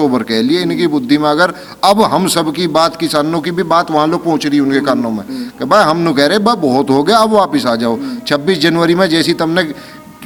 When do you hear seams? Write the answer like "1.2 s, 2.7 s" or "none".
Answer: none